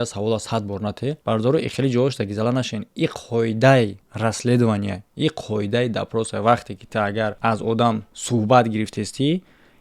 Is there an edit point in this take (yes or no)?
yes